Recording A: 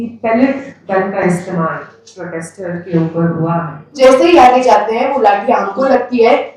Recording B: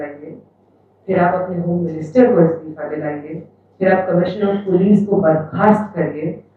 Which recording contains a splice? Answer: A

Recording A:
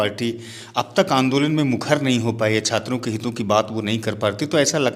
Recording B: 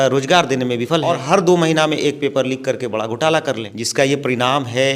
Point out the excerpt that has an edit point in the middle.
B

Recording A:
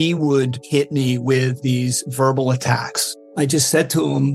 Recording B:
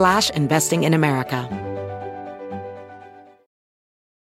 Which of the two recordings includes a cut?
B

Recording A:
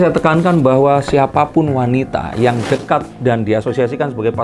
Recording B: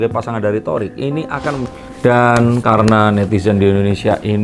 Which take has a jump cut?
B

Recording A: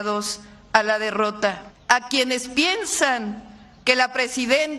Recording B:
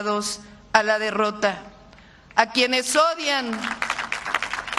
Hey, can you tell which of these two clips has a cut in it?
A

